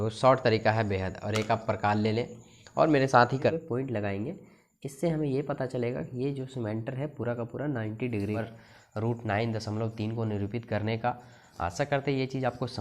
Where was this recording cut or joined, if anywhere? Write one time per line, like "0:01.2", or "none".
0:03.5
0:08.4

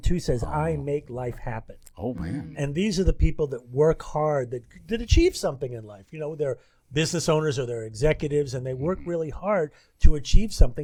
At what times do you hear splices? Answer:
none

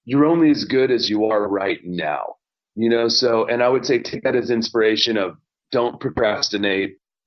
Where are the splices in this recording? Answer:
none

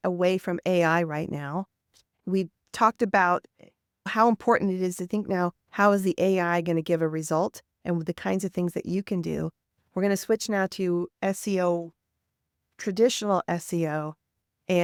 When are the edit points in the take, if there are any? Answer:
none

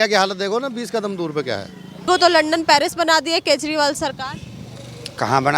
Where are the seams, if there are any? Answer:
0:02.1

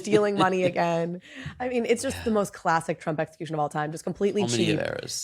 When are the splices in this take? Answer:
0:01.3

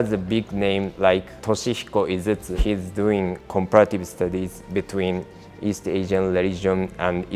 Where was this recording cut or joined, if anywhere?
0:01.3
0:02.6

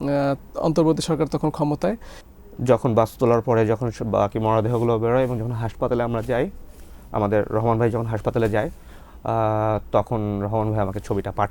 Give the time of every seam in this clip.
0:02.1

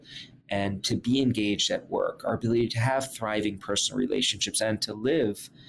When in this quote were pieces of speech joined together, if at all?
none

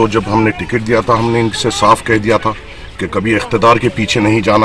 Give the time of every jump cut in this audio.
none

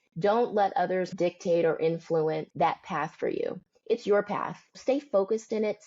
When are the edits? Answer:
0:01.1
0:02.5
0:04.8

